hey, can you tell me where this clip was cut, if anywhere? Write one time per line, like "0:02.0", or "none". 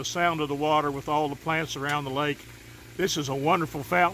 none